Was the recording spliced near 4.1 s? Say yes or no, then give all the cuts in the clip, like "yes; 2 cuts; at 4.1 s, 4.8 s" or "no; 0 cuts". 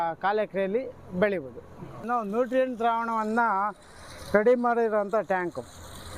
no; 1 cut; at 2.0 s